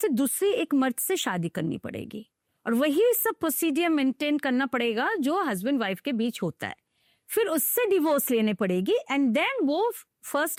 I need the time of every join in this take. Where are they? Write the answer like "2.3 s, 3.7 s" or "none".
none